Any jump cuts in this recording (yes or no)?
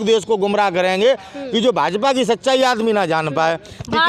no